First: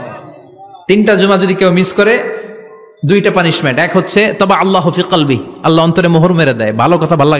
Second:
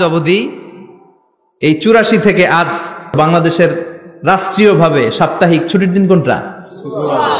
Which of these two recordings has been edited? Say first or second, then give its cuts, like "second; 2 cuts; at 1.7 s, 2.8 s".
second; 1 cut; at 3.1 s